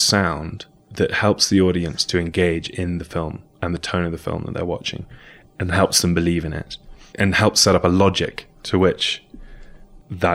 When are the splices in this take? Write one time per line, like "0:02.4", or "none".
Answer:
none